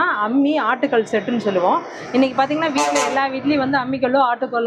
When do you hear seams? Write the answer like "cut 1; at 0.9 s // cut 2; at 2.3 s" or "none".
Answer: none